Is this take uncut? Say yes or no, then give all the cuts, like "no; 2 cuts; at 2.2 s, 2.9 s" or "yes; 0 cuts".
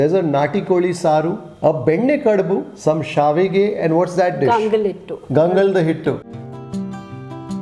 no; 2 cuts; at 2.7 s, 6.2 s